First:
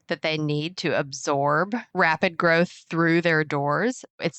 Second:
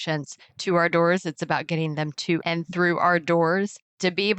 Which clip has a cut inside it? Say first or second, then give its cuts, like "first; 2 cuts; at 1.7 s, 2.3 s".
first; 1 cut; at 1.8 s